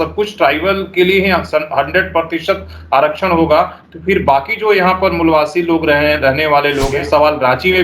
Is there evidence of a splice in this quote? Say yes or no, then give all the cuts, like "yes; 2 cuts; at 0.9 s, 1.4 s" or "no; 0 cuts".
yes; 1 cut; at 6.9 s